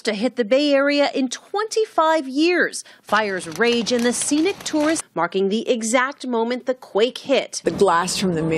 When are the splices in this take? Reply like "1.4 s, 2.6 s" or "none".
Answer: none